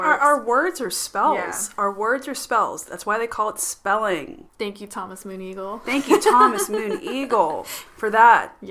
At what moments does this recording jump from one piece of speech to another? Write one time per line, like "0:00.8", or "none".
0:04.4